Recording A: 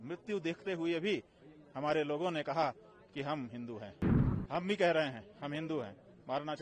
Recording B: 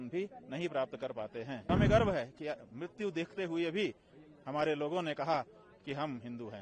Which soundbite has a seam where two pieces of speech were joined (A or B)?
B